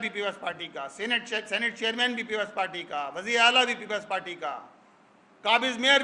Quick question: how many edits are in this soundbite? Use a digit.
0